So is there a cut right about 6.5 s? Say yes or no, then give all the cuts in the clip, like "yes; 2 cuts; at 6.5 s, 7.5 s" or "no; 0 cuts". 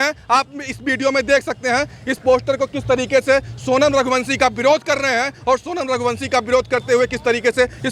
no; 0 cuts